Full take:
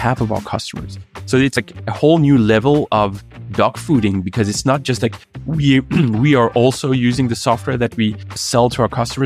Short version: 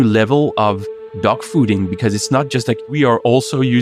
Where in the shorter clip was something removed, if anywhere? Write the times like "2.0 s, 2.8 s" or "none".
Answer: 2.9 s